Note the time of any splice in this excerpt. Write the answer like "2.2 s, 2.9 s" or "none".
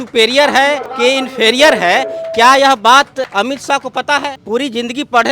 0.9 s, 3.3 s, 4.4 s

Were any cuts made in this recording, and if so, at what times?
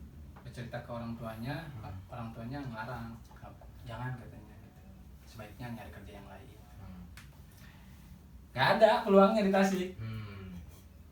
none

